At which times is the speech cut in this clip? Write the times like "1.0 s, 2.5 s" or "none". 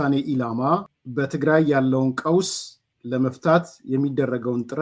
1.0 s